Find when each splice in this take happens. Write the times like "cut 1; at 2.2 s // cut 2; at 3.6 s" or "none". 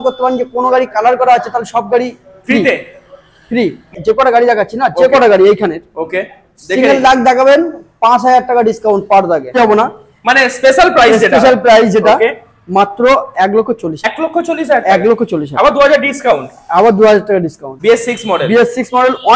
cut 1; at 3.9 s // cut 2; at 9.6 s // cut 3; at 14.1 s // cut 4; at 17.7 s